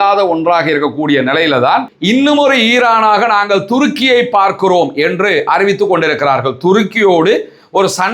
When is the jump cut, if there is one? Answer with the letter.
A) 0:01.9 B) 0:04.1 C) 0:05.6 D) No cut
A